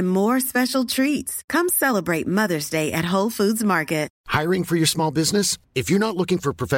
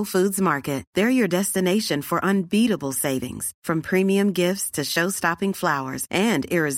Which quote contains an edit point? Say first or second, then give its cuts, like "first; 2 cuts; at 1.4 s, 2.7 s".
first; 1 cut; at 4.2 s